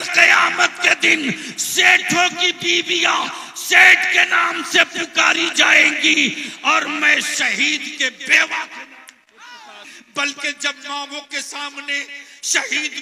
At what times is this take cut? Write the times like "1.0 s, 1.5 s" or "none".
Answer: 9.9 s